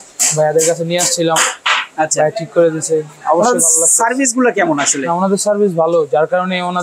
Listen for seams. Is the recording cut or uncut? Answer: uncut